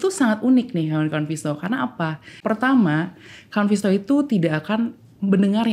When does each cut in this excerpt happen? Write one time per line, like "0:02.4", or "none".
0:02.4